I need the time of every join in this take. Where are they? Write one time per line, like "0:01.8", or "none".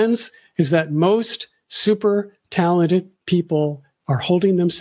none